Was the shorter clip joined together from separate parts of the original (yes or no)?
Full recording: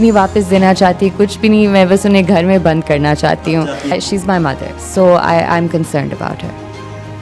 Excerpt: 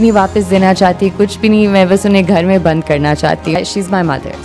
yes